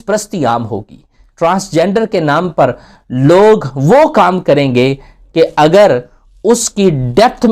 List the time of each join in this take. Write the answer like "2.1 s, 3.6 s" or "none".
none